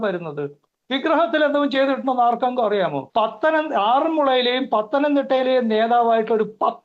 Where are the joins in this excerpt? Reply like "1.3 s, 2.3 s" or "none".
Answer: 3.0 s